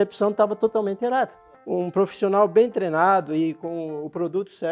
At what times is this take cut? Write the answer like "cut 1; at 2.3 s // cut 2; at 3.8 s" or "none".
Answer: cut 1; at 1.5 s